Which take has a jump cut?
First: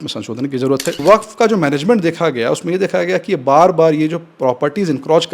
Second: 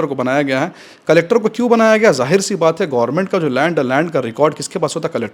first; 1 cut; at 1.0 s

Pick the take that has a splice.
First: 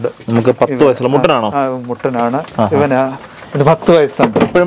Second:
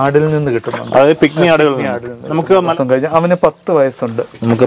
second; 1 cut; at 2.7 s

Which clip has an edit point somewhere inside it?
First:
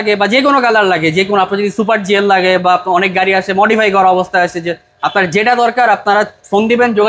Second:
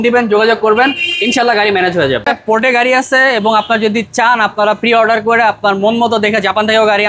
second; 1 cut; at 2.2 s

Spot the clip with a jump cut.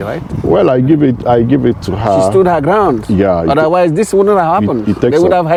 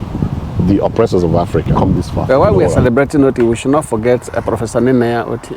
second; 1 cut; at 1.7 s

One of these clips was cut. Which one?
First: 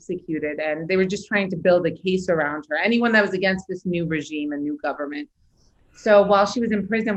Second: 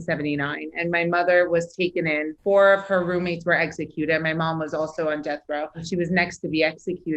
second; 2 cuts; at 2.3 s, 5.8 s

